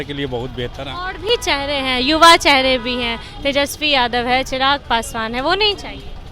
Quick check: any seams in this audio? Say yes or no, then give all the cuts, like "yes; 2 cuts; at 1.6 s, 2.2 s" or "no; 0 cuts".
no; 0 cuts